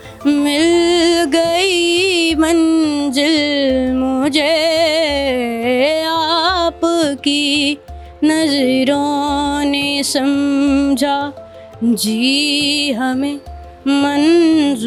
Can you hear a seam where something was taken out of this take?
no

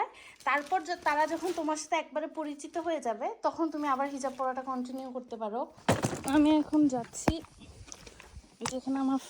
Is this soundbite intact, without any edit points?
no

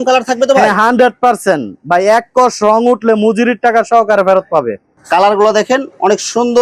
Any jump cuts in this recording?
no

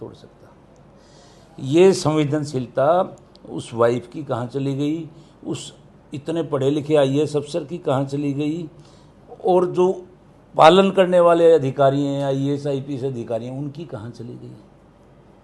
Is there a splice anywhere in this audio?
no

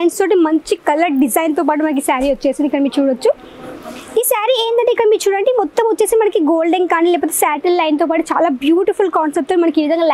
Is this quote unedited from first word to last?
yes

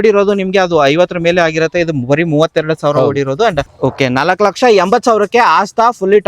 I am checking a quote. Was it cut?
yes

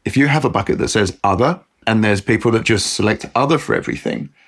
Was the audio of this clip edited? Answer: yes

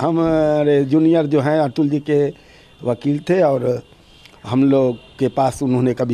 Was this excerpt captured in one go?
yes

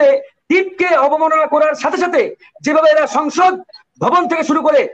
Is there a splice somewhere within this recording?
no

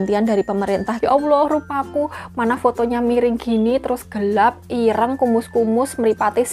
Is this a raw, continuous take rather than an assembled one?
no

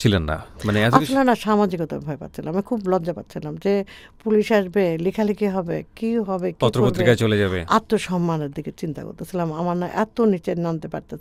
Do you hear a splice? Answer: no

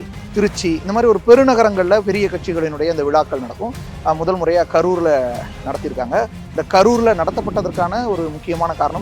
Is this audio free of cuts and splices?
yes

